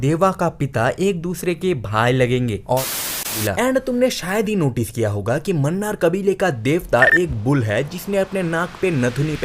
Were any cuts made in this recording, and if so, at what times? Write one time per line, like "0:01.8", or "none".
0:03.4